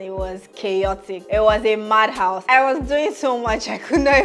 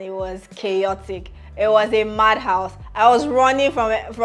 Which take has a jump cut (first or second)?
first